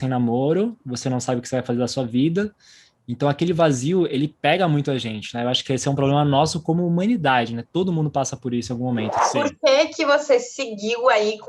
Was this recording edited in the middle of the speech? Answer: yes; 1 cut; at 9.2 s

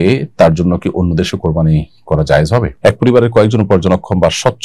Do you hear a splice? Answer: yes; 1 cut; at 2.7 s

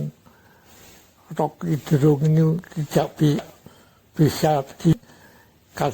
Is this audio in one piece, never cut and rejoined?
no; 1 cut; at 5.0 s

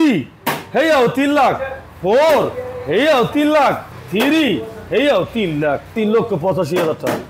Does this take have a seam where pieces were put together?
yes; 1 cut; at 5.9 s

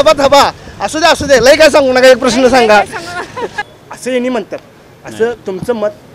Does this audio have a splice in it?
yes; 1 cut; at 3.5 s

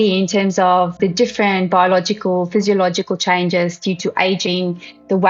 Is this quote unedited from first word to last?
no; 1 cut; at 1.0 s

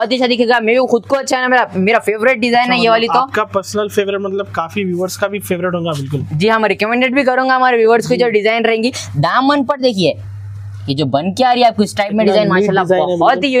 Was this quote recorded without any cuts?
yes; 0 cuts

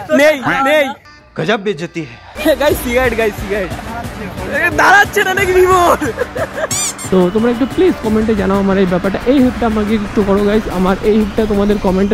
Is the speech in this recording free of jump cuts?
no; 1 cut; at 6.9 s

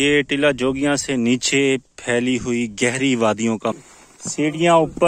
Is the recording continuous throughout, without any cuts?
no; 1 cut; at 3.7 s

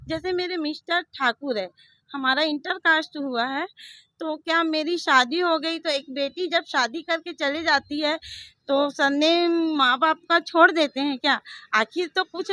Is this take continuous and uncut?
yes; 0 cuts

